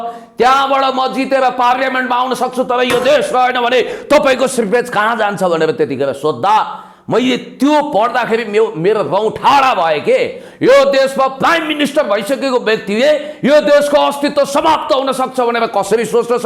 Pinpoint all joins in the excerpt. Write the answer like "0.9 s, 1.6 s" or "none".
none